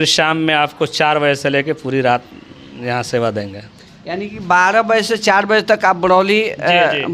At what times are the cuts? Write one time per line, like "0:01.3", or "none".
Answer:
none